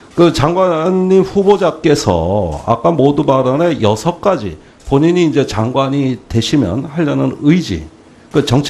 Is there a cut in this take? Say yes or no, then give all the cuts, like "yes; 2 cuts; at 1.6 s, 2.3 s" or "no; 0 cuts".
yes; 1 cut; at 6.0 s